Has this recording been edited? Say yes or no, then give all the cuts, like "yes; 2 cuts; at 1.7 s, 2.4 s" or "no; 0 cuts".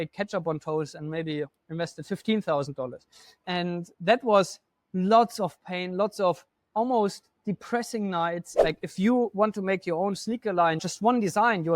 yes; 2 cuts; at 8.5 s, 10.8 s